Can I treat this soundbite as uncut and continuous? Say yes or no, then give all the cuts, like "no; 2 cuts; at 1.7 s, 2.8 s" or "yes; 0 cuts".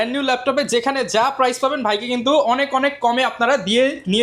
yes; 0 cuts